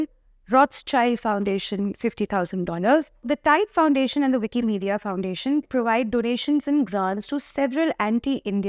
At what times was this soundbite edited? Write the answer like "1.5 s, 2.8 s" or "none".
3.2 s